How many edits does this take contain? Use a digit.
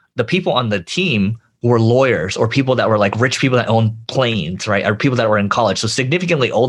1